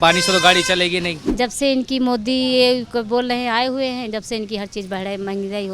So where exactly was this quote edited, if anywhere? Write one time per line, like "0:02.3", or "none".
0:01.2